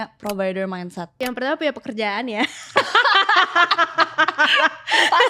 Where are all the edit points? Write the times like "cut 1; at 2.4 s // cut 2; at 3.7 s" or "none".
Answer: cut 1; at 1.1 s

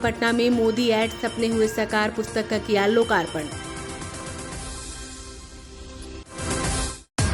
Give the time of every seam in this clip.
none

